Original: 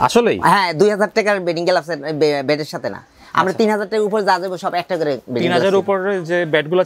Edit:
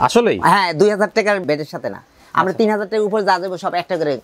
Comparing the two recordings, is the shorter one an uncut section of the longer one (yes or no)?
no